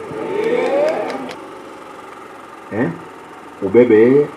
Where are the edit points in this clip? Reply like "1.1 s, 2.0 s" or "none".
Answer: 1.3 s

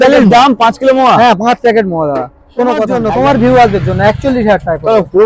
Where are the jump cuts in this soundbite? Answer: 2.9 s

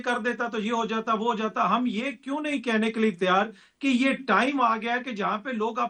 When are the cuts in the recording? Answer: none

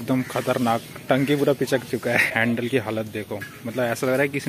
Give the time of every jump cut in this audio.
2.3 s

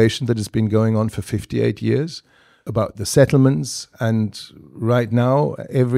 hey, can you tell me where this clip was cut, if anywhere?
2.7 s

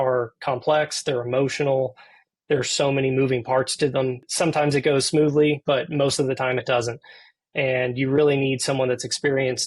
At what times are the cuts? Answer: 4.2 s

